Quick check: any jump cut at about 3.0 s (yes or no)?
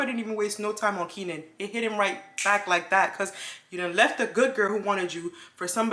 no